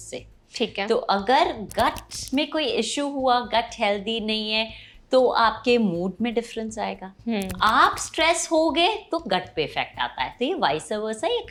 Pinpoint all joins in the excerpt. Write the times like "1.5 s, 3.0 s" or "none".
none